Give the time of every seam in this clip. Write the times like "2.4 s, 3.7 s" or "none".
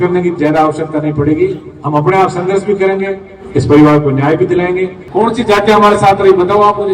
5.0 s